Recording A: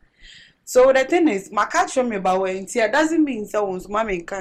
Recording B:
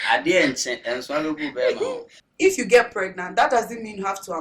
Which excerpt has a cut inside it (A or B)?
B